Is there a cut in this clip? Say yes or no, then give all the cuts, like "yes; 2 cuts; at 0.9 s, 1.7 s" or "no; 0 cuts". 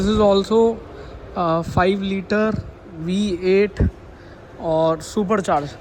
no; 0 cuts